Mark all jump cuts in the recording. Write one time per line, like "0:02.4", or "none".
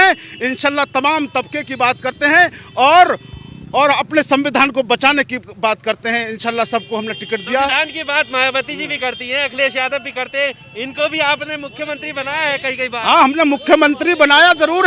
none